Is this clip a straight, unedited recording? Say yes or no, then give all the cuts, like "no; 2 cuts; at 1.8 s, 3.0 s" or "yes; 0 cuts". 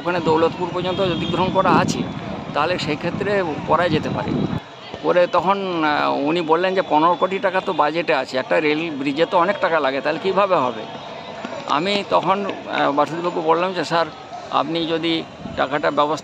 yes; 0 cuts